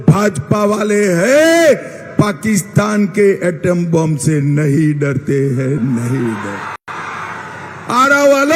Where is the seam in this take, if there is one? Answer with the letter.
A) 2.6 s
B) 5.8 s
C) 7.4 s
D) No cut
D